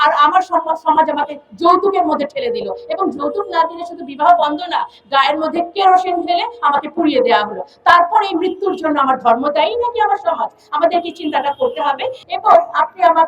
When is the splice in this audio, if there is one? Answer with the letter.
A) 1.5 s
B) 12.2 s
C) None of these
B